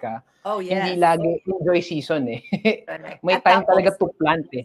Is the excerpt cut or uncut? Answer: uncut